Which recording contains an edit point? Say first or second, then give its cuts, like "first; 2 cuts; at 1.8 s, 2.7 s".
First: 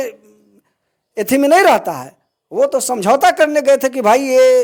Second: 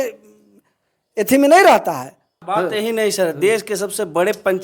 second; 1 cut; at 2.3 s